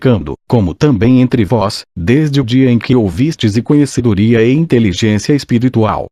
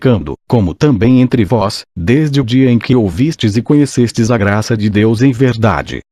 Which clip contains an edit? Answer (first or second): second